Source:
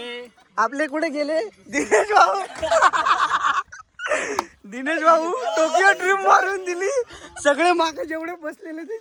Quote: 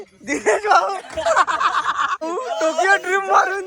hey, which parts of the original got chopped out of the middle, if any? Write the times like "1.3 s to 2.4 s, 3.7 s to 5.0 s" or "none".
3.7 s to 5.2 s